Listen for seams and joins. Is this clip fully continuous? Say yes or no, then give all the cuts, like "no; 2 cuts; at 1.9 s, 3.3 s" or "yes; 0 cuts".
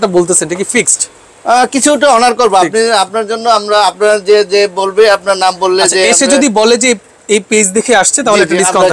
yes; 0 cuts